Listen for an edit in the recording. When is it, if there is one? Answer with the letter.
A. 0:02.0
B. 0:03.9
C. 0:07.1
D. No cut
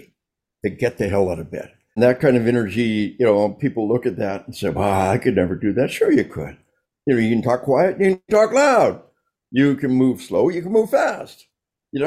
A